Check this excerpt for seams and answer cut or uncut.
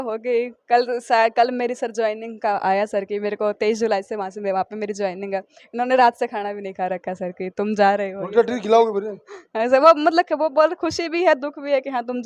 uncut